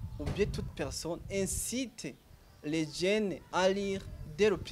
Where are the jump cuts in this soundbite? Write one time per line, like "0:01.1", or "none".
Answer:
0:03.5